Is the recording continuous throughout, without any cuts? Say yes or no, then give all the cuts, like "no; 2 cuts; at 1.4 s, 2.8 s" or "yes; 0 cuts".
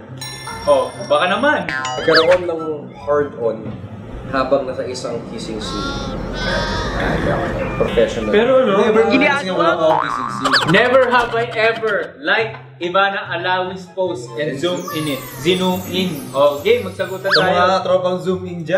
no; 2 cuts; at 2.0 s, 10.6 s